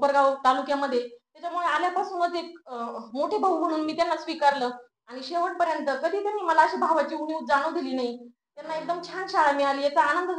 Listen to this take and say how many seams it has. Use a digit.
0